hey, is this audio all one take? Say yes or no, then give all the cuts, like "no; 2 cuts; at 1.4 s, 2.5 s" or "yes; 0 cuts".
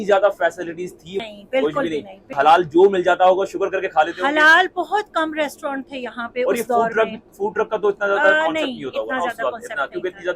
no; 2 cuts; at 1.2 s, 2.3 s